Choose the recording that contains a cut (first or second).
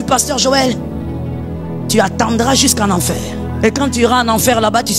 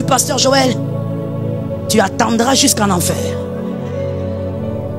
first